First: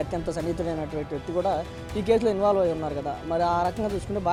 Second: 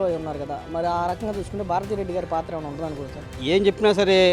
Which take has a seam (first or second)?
second